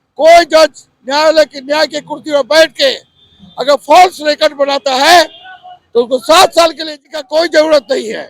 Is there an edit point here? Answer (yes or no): yes